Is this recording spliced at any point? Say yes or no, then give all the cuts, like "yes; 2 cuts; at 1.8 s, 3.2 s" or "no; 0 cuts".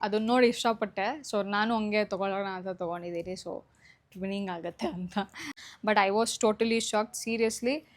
yes; 1 cut; at 5.6 s